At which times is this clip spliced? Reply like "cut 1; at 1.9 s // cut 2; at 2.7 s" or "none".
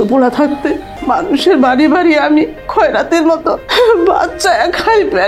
cut 1; at 0.9 s // cut 2; at 3.7 s